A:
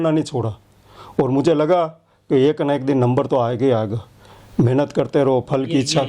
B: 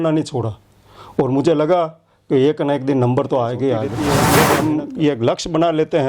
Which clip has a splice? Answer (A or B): B